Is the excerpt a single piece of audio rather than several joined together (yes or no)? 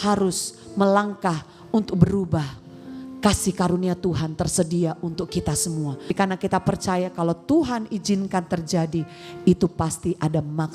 no